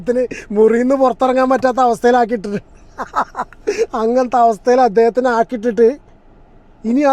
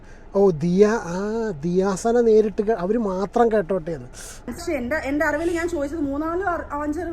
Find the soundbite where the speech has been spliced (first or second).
second